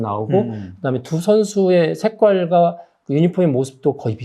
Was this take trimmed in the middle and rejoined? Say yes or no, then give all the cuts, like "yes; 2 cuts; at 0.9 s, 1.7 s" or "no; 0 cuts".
no; 0 cuts